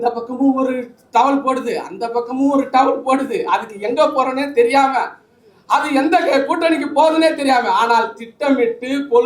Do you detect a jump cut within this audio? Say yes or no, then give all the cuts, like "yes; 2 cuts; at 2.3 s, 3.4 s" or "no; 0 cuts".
no; 0 cuts